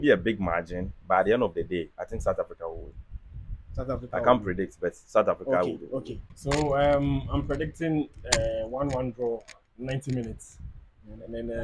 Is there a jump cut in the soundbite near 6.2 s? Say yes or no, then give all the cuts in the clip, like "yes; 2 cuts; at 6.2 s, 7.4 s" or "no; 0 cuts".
yes; 1 cut; at 6.2 s